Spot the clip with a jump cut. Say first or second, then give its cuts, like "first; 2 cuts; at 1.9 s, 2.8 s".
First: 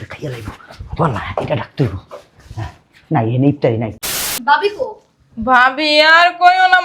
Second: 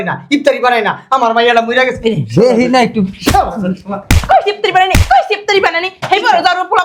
first; 1 cut; at 4.3 s